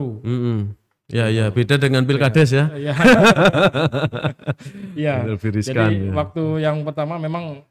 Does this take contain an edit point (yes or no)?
no